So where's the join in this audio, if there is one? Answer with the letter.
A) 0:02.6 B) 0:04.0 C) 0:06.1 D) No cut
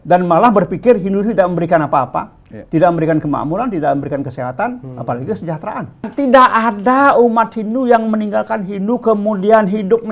C